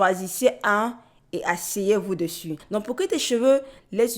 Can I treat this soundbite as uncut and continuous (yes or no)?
no